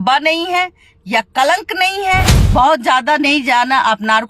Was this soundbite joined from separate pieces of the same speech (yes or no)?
yes